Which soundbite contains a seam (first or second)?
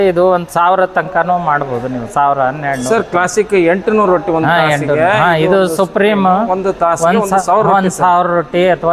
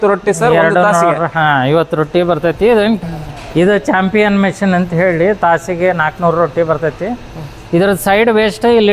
second